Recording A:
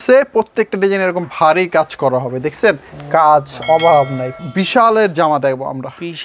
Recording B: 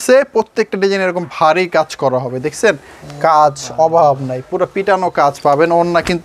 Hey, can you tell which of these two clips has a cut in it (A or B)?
A